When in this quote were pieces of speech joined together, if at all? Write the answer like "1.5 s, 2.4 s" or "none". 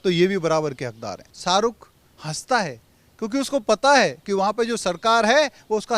1.3 s